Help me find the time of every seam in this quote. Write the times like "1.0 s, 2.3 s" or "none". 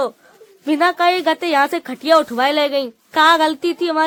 none

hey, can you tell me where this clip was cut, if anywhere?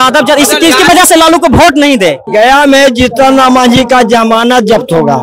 2.2 s

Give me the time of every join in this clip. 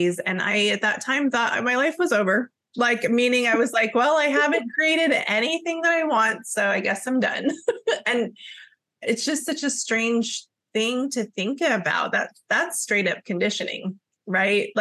none

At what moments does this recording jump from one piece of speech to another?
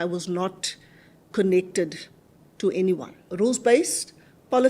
3.2 s

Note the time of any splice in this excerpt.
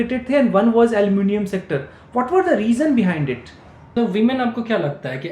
3.9 s

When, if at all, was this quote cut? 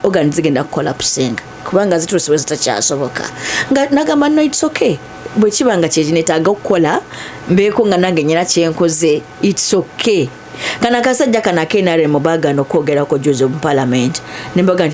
none

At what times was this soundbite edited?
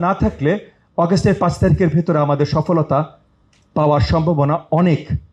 none

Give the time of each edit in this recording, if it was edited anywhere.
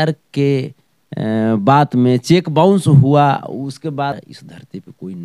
4.2 s

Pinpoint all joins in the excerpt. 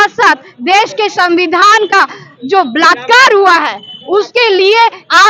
none

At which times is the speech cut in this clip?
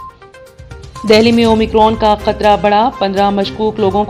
none

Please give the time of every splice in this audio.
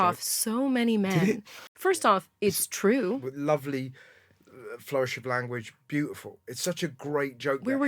1.5 s, 3.2 s

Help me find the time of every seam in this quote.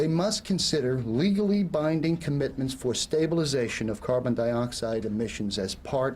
2.9 s

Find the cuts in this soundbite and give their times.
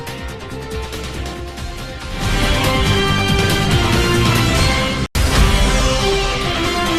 none

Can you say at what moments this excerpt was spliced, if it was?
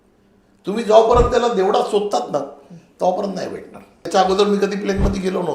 4.1 s

